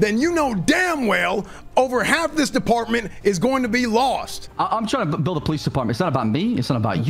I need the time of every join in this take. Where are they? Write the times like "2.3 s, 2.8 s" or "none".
4.4 s